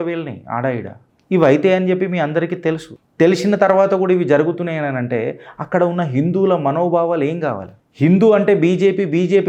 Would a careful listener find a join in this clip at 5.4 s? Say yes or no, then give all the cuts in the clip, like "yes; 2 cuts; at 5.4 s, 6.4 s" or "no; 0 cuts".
no; 0 cuts